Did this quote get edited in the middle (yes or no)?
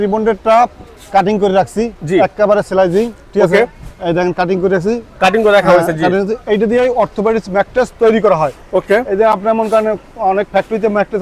no